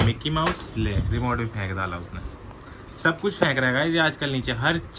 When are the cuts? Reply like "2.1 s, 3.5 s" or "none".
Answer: none